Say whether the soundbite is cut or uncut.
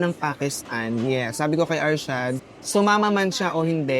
cut